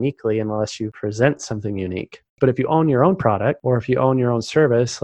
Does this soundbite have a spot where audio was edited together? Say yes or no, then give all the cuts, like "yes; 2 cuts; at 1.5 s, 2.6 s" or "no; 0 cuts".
yes; 3 cuts; at 0.9 s, 2.3 s, 3.6 s